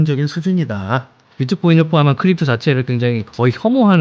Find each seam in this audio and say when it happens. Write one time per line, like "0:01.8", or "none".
0:01.3